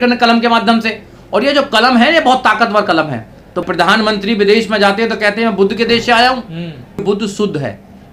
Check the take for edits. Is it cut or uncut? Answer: cut